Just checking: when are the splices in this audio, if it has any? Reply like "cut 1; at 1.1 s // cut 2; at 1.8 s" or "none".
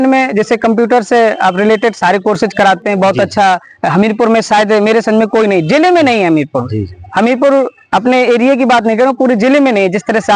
none